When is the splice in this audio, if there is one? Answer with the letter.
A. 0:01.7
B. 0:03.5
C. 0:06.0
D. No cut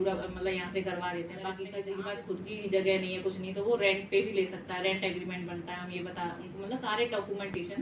A